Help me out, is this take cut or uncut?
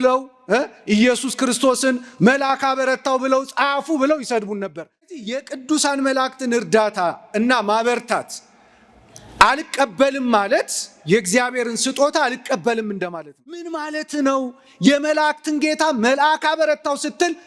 cut